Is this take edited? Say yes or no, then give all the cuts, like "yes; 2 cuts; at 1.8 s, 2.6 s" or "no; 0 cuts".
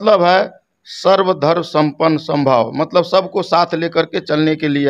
no; 0 cuts